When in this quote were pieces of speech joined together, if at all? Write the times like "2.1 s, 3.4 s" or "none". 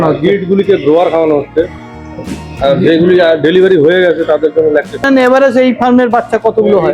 5.2 s